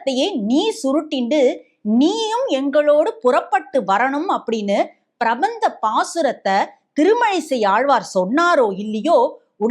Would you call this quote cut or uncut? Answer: uncut